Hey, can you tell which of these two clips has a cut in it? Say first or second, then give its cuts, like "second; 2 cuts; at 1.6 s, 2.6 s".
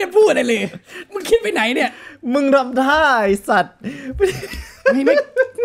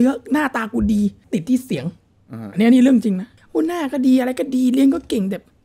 second; 2 cuts; at 1.2 s, 3.4 s